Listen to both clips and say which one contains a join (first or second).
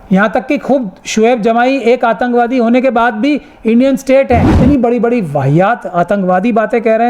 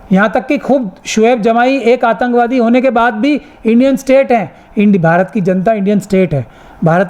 first